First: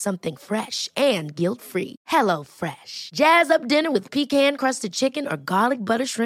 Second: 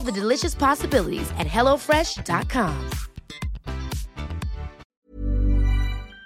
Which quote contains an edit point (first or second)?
second